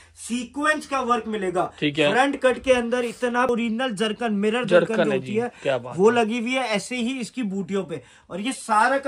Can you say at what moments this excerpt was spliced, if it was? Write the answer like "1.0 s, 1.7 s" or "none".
3.5 s